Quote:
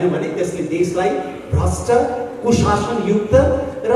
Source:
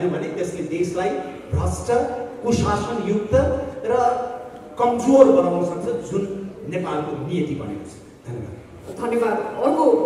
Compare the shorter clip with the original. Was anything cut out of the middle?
no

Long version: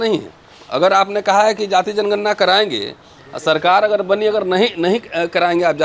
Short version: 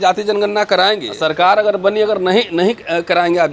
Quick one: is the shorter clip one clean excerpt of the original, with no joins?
no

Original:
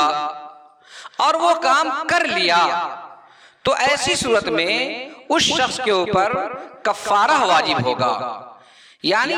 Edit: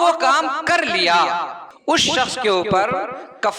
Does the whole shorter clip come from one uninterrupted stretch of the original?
no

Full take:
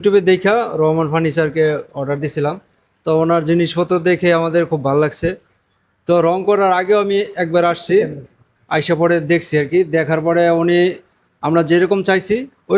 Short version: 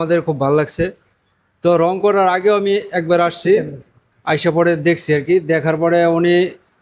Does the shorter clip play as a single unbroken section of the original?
yes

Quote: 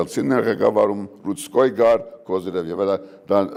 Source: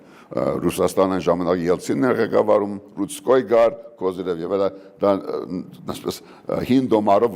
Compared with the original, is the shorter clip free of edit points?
yes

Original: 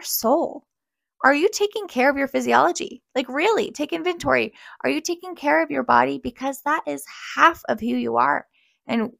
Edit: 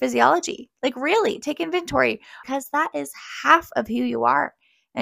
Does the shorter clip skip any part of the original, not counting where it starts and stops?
yes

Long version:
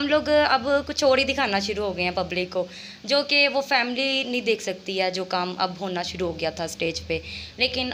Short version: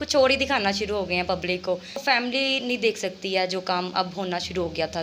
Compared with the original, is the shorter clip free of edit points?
no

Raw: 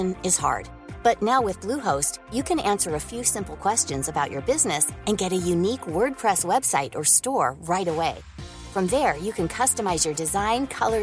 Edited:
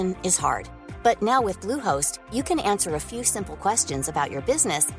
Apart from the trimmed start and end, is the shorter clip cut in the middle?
no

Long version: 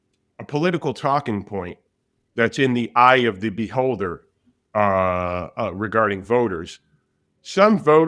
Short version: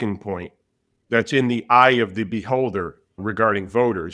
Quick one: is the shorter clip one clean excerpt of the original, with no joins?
no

